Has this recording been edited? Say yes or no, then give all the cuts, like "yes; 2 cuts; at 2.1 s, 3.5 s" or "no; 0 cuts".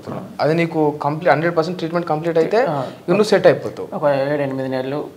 no; 0 cuts